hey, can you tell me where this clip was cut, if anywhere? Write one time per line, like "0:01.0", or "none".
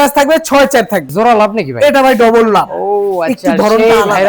0:01.1